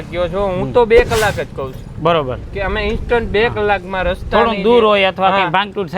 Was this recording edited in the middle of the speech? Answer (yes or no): no